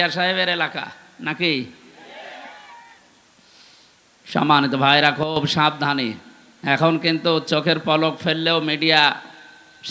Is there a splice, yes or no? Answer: no